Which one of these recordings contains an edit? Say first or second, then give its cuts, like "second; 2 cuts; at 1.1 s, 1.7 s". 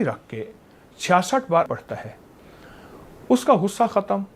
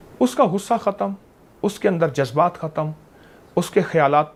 first; 1 cut; at 1.7 s